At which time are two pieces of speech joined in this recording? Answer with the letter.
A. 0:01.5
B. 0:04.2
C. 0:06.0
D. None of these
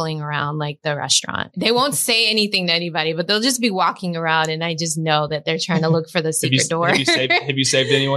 A